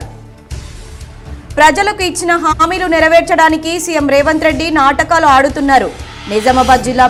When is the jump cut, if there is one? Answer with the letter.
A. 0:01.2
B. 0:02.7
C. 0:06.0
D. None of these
D